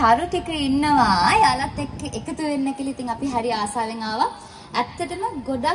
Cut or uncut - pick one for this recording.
uncut